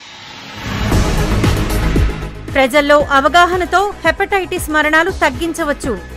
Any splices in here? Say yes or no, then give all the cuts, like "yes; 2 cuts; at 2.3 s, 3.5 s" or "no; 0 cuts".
yes; 1 cut; at 1.9 s